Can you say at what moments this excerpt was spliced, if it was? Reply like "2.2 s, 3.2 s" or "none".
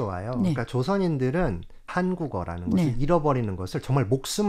1.9 s